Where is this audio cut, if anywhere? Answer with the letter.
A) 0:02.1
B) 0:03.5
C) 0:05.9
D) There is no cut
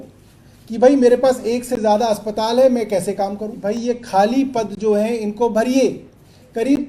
B